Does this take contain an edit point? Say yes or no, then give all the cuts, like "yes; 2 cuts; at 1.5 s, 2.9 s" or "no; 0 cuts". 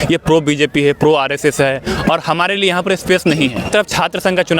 yes; 1 cut; at 3.7 s